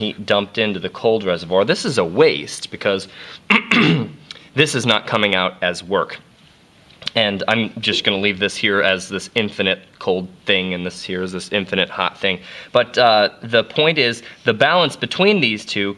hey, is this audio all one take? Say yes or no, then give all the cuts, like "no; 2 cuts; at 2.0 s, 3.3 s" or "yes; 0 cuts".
no; 1 cut; at 3.9 s